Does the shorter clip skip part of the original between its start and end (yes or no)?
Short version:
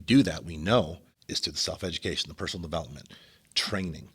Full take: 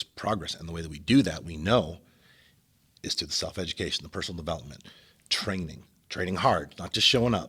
yes